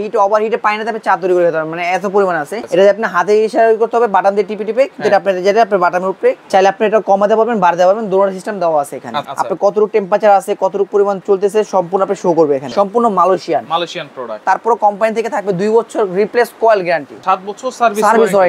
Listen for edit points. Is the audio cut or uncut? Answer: cut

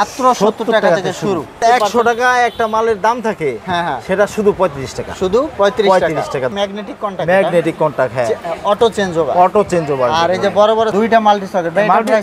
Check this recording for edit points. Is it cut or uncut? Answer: cut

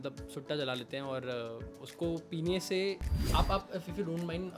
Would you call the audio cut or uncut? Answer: cut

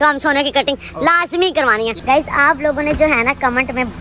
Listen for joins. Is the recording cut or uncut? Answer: cut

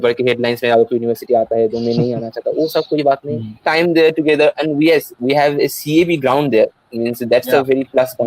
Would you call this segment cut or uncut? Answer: cut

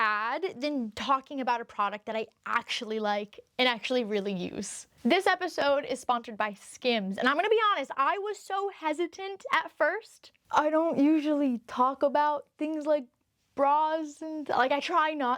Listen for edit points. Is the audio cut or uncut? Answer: cut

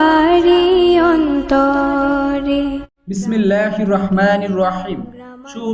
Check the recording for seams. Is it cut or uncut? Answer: cut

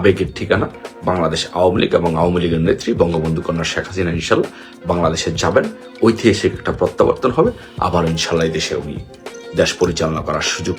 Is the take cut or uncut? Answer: uncut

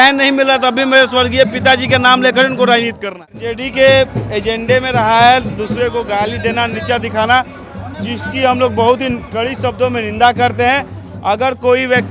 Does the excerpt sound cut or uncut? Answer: cut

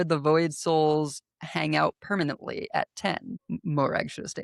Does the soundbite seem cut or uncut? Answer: cut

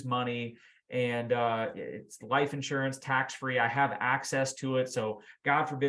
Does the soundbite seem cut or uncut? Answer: uncut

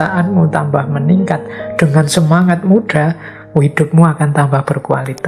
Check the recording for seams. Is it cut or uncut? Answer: uncut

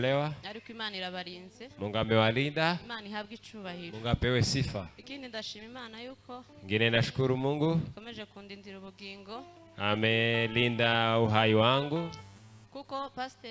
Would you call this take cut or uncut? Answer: uncut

